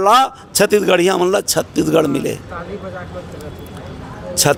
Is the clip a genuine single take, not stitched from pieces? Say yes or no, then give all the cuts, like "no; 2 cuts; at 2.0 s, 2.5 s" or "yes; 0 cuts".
yes; 0 cuts